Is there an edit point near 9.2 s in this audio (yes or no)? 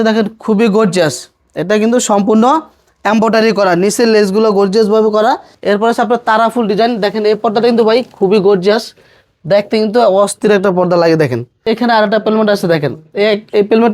no